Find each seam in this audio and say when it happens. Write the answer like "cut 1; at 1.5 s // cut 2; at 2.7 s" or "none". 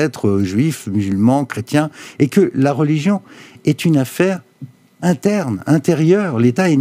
none